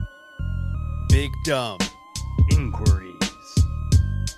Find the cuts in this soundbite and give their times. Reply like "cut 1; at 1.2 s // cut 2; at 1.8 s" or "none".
cut 1; at 1.0 s